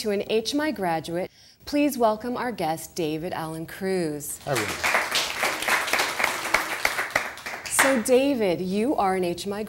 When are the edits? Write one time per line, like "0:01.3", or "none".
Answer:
none